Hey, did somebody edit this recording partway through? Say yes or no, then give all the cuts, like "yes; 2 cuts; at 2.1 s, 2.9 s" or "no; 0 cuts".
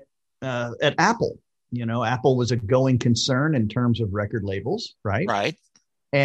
no; 0 cuts